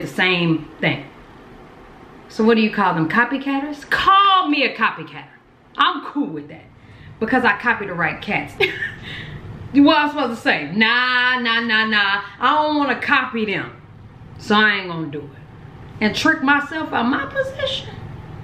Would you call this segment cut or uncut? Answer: cut